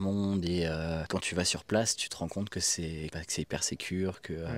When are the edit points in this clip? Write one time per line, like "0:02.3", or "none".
0:01.1
0:03.1